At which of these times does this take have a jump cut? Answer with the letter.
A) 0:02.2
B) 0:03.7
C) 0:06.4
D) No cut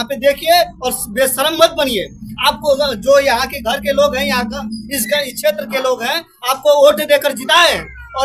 D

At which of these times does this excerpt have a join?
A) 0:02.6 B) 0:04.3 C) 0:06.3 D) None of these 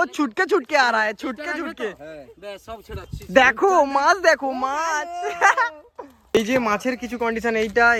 D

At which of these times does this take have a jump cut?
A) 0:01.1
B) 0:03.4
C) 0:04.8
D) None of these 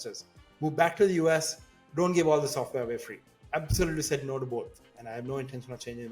B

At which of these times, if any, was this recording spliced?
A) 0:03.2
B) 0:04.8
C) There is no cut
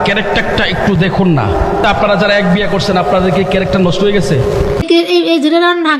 B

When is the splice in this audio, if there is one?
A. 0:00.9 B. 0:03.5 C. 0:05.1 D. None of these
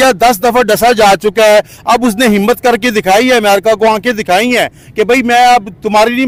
D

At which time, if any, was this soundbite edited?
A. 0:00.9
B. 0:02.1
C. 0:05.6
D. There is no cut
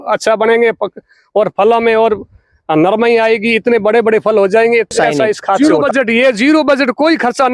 C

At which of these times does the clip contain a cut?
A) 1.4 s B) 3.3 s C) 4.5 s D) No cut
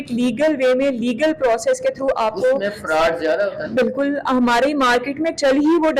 D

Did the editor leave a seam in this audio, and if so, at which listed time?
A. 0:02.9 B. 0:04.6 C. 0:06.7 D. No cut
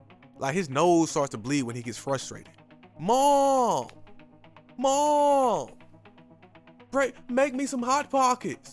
A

